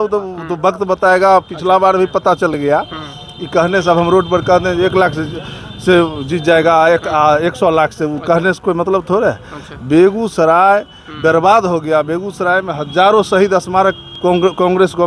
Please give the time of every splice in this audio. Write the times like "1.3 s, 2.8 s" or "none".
none

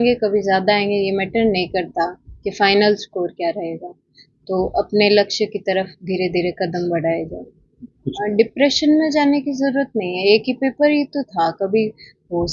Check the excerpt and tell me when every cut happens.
8.1 s

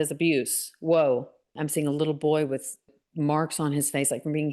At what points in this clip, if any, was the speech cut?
1.5 s, 2.9 s

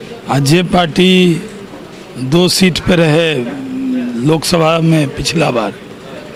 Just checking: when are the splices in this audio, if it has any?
none

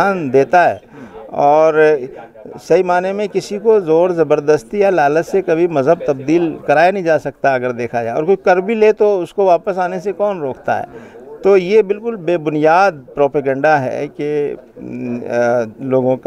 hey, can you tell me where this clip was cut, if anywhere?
none

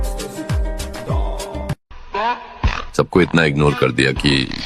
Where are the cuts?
1.8 s

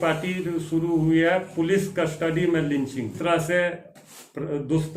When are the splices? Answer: 3.2 s

